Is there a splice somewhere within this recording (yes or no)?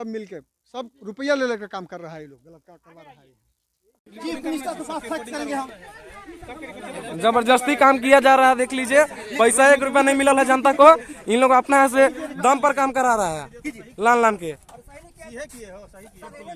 yes